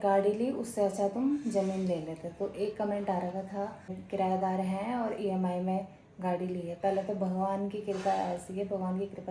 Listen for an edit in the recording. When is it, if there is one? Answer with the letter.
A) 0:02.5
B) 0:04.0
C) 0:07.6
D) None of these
B